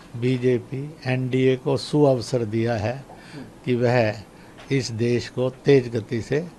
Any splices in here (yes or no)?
no